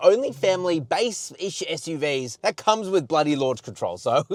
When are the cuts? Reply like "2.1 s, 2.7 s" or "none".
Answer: none